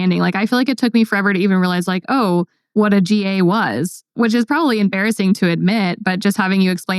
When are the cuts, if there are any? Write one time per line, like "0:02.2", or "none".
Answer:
0:02.6